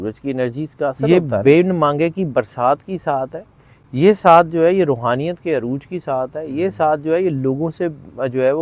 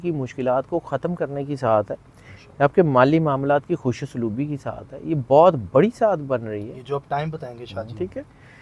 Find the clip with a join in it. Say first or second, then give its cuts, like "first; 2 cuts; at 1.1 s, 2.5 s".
first; 1 cut; at 1.1 s